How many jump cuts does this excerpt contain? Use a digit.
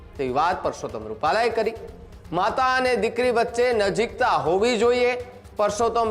0